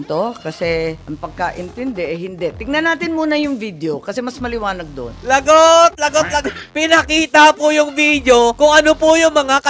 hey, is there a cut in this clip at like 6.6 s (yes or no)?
yes